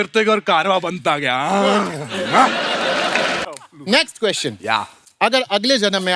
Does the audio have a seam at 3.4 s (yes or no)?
yes